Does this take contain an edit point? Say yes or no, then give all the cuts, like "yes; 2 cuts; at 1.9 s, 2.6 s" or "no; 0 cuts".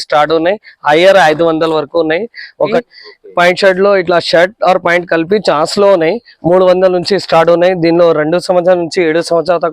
yes; 1 cut; at 2.8 s